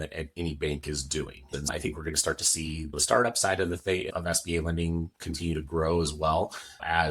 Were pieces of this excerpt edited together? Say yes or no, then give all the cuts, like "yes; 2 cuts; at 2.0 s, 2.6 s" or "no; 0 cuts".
yes; 1 cut; at 1.4 s